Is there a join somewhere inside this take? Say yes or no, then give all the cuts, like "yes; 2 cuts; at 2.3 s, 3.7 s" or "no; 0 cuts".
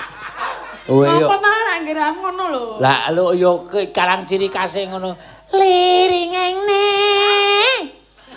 yes; 1 cut; at 1.8 s